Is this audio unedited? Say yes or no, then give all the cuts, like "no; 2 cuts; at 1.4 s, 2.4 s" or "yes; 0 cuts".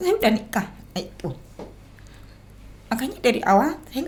yes; 0 cuts